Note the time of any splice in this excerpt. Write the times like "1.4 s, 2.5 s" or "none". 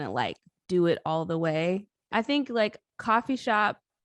1.9 s